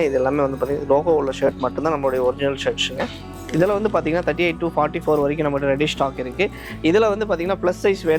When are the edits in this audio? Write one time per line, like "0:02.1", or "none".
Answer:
none